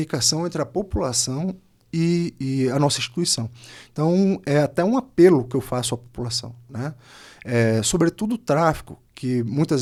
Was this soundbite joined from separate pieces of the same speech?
no; 0 cuts

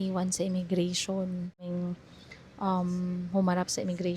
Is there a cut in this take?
yes; 1 cut; at 1.7 s

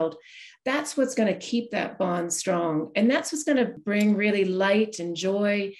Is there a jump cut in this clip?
yes; 1 cut; at 3.8 s

